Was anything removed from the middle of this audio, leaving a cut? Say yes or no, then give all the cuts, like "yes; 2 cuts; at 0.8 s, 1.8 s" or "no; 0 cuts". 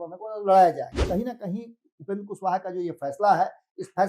yes; 1 cut; at 1.0 s